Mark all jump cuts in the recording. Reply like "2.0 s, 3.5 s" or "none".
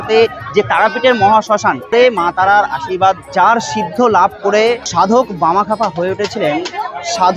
1.9 s, 3.3 s, 4.8 s